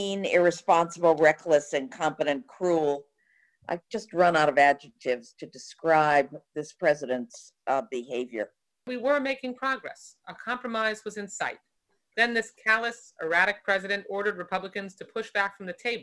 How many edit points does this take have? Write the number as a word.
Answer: one